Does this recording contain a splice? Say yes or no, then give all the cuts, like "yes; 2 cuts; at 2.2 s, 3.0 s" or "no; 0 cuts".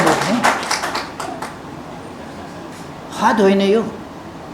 no; 0 cuts